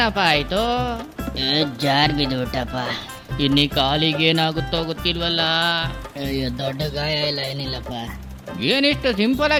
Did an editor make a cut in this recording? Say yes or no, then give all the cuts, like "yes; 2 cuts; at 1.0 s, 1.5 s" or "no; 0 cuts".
no; 0 cuts